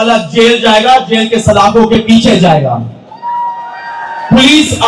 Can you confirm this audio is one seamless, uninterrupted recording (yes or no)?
yes